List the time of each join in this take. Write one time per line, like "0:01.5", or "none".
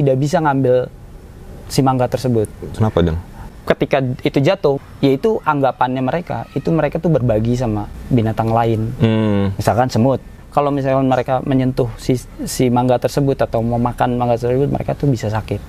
0:03.5
0:04.8
0:10.3